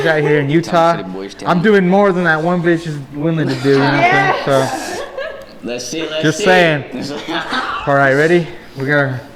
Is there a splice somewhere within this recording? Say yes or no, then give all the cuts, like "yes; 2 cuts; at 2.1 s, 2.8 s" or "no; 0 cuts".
no; 0 cuts